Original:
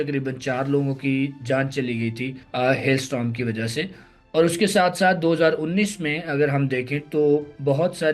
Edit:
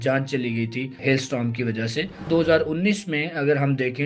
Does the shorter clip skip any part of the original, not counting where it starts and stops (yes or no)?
yes